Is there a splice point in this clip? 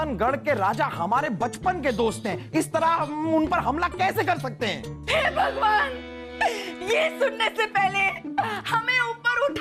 no; 0 cuts

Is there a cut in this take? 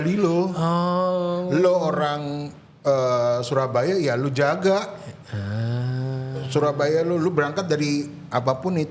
no; 0 cuts

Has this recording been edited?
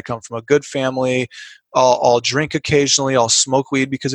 no; 0 cuts

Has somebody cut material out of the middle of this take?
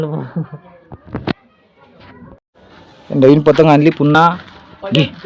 yes; 1 cut; at 2.5 s

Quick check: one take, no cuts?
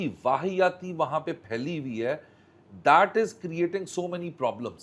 yes; 0 cuts

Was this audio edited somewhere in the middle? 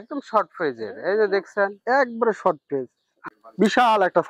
yes; 1 cut; at 3.1 s

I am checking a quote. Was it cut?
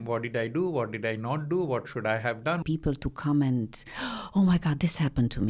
yes; 1 cut; at 2.6 s

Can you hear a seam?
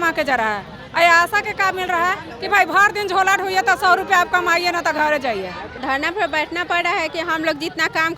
yes; 1 cut; at 5.7 s

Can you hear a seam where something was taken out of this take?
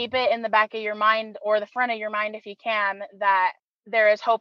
no; 0 cuts

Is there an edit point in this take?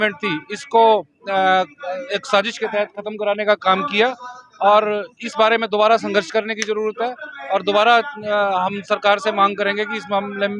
no; 0 cuts

